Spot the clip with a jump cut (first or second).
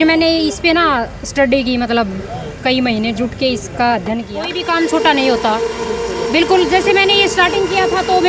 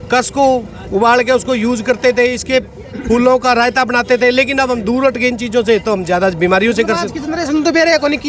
first